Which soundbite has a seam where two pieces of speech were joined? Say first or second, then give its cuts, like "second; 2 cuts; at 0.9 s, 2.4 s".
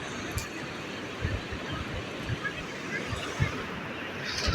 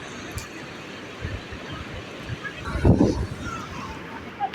first; 1 cut; at 2.6 s